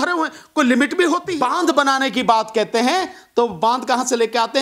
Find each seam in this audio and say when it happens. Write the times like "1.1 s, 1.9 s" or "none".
1.3 s